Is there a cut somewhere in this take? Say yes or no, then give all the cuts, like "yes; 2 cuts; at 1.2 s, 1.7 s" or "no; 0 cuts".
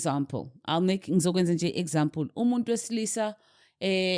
no; 0 cuts